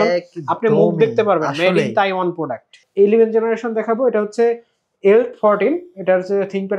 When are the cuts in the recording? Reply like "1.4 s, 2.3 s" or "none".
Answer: 2.8 s